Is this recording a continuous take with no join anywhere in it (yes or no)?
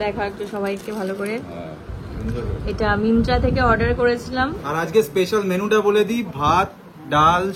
no